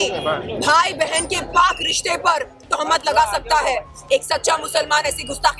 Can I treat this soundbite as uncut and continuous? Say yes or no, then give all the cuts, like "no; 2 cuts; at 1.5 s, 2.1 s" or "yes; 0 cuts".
yes; 0 cuts